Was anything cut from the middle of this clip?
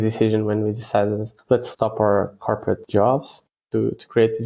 yes; 3 cuts; at 1.4 s, 2.8 s, 3.6 s

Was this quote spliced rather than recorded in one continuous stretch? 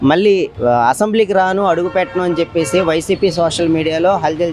no; 0 cuts

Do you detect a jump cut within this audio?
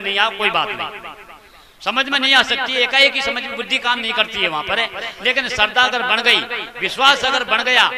no; 0 cuts

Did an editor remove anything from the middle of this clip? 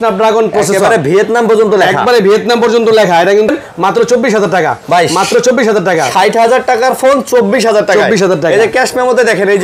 yes; 1 cut; at 3.5 s

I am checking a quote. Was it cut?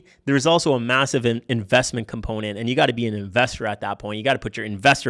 no; 0 cuts

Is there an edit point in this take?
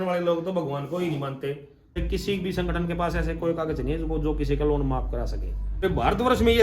yes; 2 cuts; at 2.0 s, 5.8 s

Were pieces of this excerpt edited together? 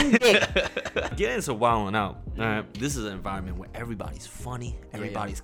yes; 2 cuts; at 1.1 s, 2.7 s

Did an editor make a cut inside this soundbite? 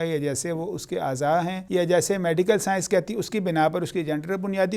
yes; 1 cut; at 1.6 s

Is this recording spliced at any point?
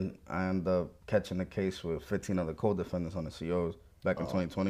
no; 0 cuts

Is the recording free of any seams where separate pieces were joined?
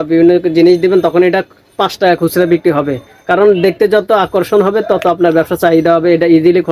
yes; 0 cuts

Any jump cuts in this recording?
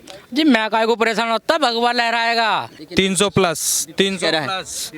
yes; 1 cut; at 2.8 s

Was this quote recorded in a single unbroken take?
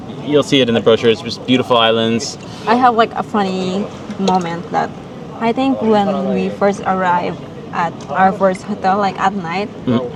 yes; 0 cuts

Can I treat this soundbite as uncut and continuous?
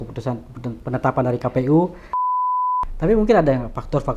no; 1 cut; at 2.4 s

